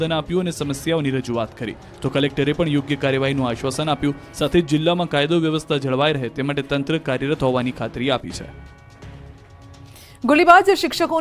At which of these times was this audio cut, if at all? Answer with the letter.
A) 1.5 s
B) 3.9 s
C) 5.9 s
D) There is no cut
B